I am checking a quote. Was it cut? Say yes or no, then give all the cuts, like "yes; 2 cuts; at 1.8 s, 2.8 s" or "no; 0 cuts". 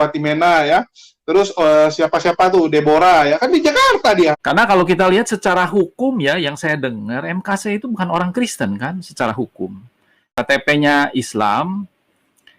yes; 2 cuts; at 4.4 s, 10.3 s